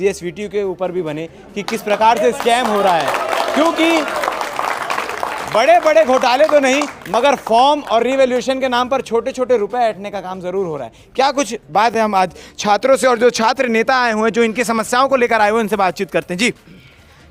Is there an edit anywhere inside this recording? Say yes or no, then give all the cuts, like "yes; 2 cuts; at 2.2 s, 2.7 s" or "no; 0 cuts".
no; 0 cuts